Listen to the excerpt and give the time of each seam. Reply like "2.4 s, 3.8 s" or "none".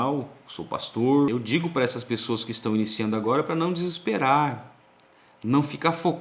1.3 s